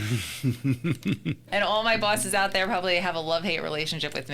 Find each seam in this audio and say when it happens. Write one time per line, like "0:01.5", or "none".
0:01.4